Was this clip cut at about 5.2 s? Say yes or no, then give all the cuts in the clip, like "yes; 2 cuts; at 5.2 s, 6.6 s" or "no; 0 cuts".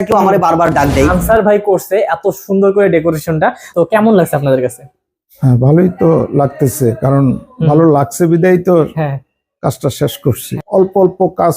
no; 3 cuts; at 1.2 s, 3.7 s, 10.5 s